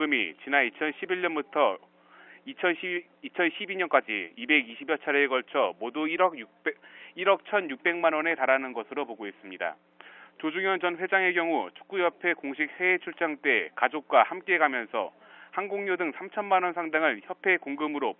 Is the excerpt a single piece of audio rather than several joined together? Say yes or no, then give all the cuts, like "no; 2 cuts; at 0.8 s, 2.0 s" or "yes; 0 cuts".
no; 1 cut; at 4.4 s